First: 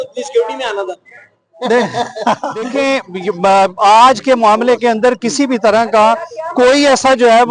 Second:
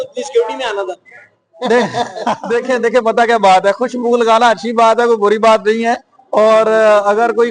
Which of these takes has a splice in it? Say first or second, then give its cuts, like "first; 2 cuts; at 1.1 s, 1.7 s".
first; 1 cut; at 2.7 s